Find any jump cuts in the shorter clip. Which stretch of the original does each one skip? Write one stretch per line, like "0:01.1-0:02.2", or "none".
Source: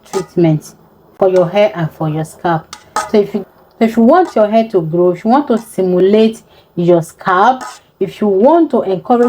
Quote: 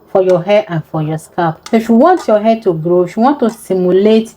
0:02.7-0:03.7

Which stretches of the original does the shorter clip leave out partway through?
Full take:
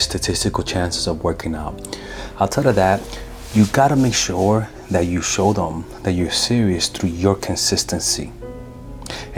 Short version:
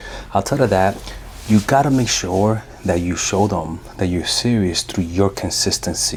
none

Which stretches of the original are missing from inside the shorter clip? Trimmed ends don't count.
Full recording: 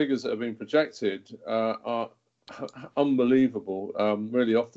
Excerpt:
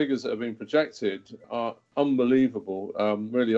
0:01.3-0:02.3

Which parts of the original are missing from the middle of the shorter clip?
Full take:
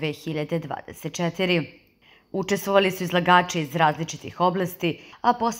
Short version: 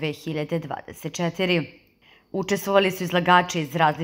none

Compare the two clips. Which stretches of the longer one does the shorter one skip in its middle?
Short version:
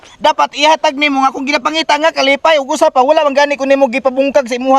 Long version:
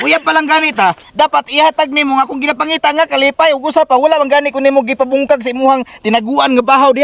none

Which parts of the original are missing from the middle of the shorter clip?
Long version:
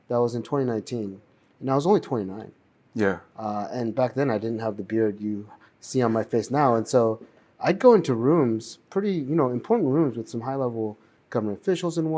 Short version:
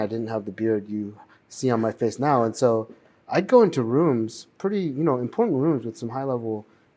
none

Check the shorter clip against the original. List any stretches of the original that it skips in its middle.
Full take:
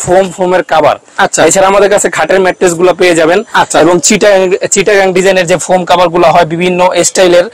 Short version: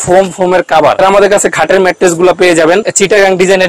0:01.0-0:01.6
0:03.5-0:04.7

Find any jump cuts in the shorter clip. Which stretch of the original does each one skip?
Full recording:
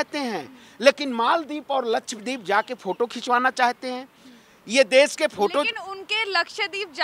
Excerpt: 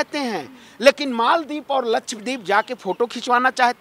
none

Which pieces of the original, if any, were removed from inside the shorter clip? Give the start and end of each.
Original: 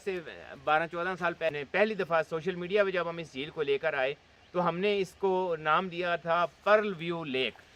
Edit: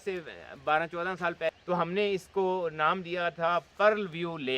0:01.6-0:04.5

